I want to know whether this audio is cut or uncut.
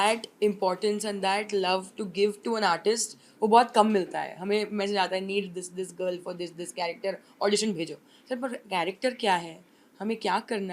uncut